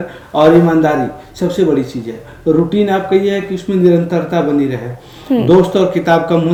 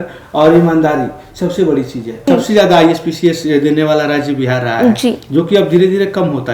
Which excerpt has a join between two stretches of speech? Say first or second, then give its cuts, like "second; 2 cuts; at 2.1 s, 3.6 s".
second; 1 cut; at 2.3 s